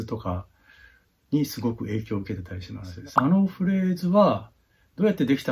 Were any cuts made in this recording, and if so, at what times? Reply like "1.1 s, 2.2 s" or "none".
3.0 s

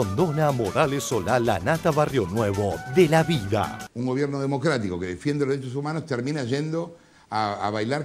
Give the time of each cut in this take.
3.8 s

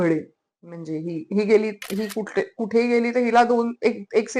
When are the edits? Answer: none

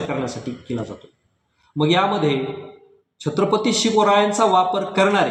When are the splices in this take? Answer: none

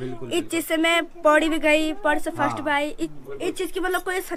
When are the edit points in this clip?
3.1 s

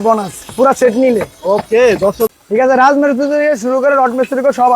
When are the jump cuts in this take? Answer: 2.3 s

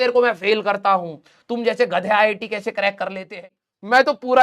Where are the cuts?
3.5 s

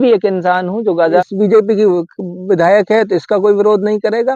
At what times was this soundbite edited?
1.3 s

